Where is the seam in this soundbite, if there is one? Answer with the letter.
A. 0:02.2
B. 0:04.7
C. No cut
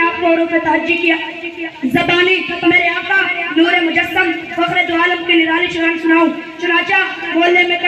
C